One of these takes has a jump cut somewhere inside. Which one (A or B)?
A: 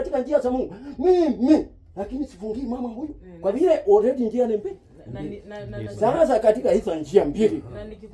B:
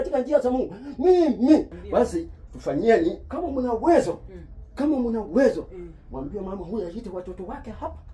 B